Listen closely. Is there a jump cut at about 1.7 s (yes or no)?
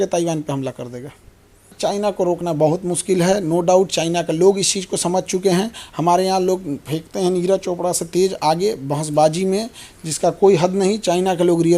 yes